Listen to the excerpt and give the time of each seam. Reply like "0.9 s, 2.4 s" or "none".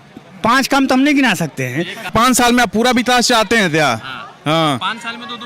2.1 s